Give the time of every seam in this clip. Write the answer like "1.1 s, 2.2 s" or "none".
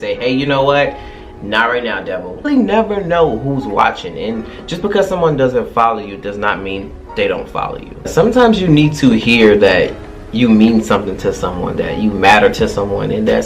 2.4 s, 8.1 s

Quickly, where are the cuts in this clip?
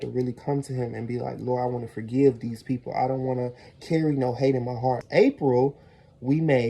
5.0 s

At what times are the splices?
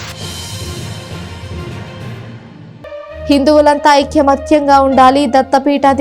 3.0 s

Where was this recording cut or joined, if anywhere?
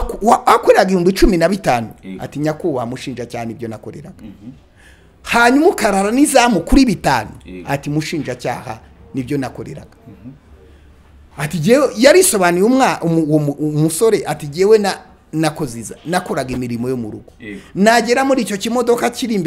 none

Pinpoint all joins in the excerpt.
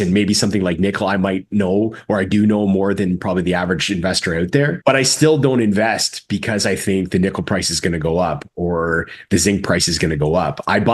4.8 s

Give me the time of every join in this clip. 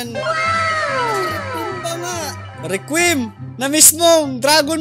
2.0 s

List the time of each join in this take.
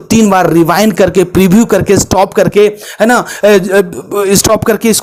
none

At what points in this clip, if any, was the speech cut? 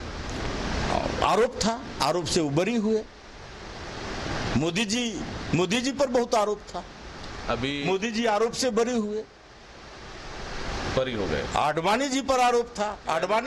none

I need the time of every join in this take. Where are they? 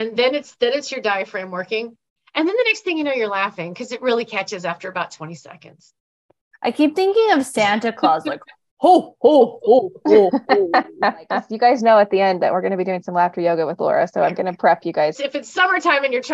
11.4 s, 15.2 s

